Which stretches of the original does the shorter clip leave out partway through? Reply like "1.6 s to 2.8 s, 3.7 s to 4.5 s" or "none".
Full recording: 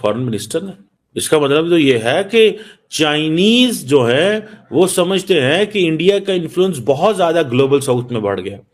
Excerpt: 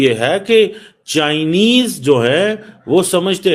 none